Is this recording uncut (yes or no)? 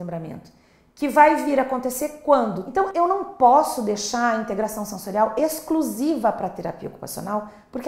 no